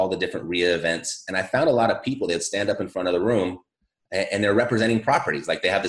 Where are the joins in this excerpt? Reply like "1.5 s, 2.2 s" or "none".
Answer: none